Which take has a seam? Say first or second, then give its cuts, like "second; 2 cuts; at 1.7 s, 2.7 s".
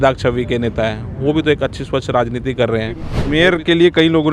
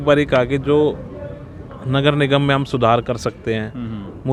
first; 1 cut; at 3.1 s